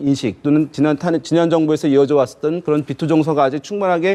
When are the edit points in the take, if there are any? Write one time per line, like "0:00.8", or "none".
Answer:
none